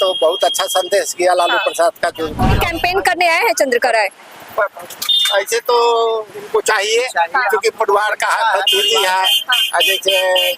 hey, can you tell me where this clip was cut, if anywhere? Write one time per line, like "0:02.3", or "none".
0:02.4